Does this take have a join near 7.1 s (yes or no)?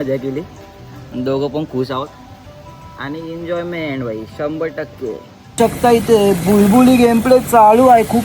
no